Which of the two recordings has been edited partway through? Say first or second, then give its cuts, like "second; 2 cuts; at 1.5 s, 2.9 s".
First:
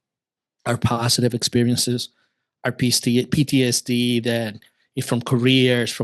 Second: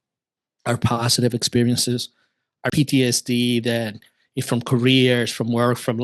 second; 1 cut; at 2.7 s